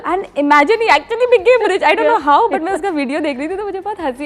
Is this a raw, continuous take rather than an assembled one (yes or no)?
yes